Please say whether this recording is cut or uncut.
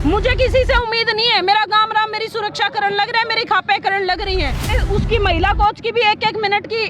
cut